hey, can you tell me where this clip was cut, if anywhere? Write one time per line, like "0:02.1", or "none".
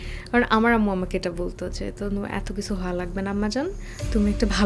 none